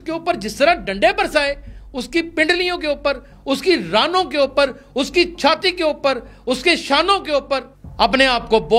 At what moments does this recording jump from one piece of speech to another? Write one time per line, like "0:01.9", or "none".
0:07.8

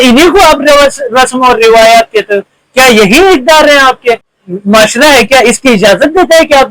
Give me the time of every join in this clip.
0:04.3

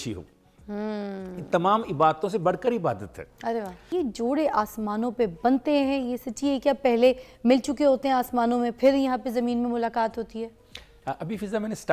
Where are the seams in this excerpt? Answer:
0:03.8

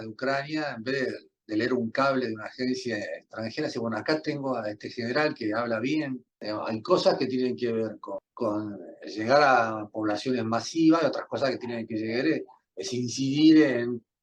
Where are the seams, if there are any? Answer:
0:06.3
0:08.3

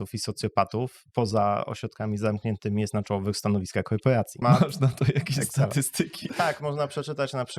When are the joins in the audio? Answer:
0:04.4
0:06.3

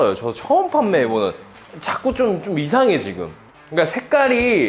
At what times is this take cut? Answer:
0:01.6

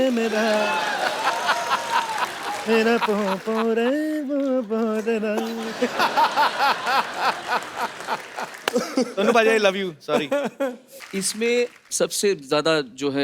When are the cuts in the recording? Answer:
0:10.9

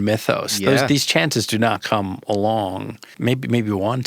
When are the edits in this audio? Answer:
0:03.1

